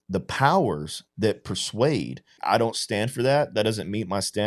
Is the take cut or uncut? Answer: cut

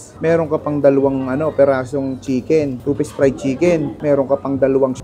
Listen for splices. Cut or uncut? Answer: uncut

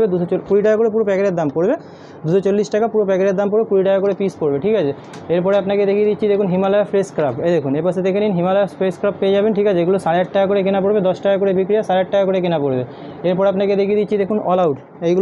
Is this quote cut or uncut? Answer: uncut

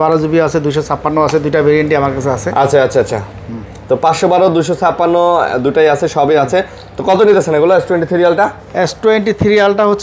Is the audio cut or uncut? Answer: uncut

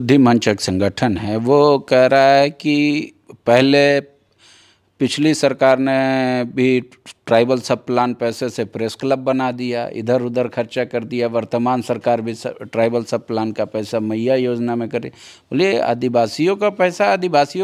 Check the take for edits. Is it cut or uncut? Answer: uncut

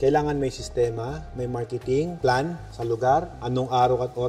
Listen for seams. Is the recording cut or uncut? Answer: uncut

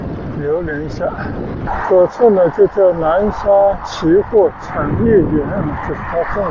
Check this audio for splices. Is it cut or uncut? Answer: cut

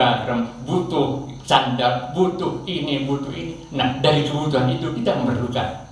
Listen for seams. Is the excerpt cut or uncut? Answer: uncut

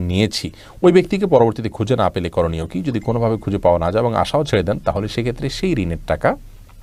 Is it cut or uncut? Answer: uncut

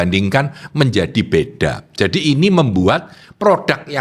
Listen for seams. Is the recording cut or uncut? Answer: uncut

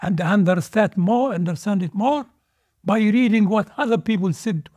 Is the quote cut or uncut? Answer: uncut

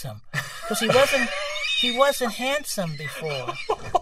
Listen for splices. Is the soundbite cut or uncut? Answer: uncut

